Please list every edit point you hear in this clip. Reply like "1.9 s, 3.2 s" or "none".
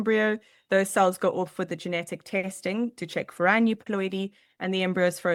none